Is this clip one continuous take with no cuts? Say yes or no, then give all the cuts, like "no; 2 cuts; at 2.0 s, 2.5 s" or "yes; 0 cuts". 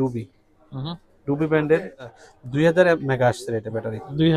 no; 1 cut; at 2.2 s